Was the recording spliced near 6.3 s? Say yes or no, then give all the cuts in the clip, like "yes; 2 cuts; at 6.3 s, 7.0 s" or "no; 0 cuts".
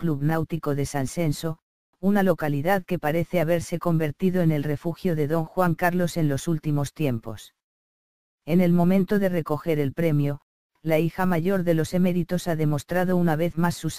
yes; 1 cut; at 6.3 s